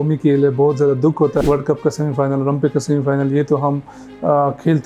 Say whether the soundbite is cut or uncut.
cut